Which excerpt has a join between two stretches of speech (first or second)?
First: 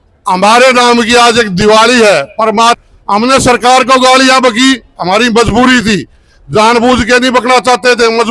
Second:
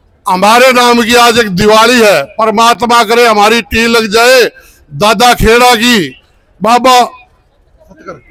first